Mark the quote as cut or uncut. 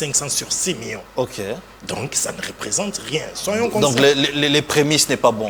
uncut